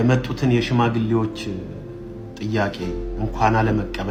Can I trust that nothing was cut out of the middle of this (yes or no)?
yes